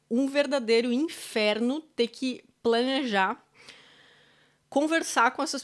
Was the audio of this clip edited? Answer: no; 0 cuts

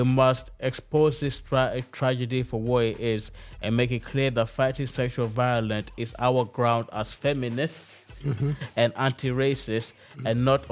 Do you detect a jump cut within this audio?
no; 0 cuts

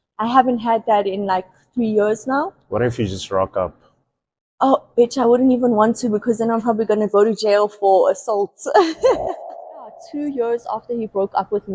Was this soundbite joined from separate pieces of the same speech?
yes; 1 cut; at 9.9 s

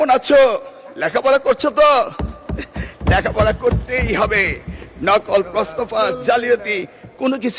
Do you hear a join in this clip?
no; 0 cuts

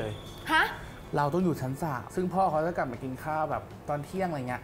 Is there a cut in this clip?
yes; 1 cut; at 1.0 s

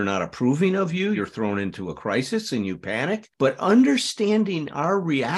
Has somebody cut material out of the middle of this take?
yes; 1 cut; at 1.2 s

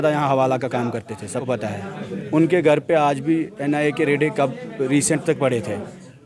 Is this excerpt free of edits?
no; 1 cut; at 1.4 s

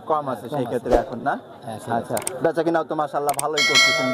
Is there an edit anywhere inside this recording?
no; 0 cuts

